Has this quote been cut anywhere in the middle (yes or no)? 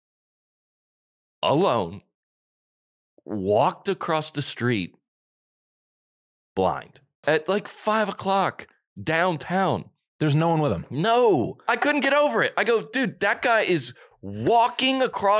yes